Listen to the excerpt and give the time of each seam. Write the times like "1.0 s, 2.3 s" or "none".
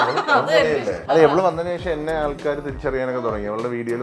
1.0 s